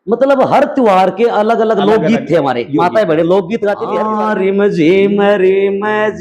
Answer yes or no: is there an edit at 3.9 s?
yes